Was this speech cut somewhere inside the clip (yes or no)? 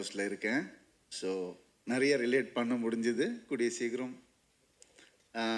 no